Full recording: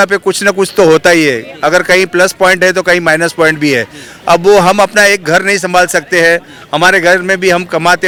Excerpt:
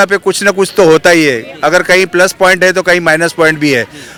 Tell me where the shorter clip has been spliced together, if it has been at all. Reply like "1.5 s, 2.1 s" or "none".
none